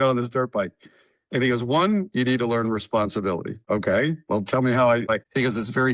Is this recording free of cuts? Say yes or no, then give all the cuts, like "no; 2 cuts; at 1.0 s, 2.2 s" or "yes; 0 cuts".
no; 2 cuts; at 3.6 s, 5.1 s